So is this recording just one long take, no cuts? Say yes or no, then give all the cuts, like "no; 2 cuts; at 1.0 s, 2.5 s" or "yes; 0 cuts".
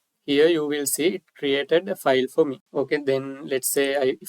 no; 1 cut; at 2.6 s